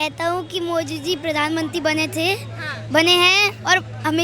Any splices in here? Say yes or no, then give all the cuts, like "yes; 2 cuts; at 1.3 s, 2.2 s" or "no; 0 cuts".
no; 0 cuts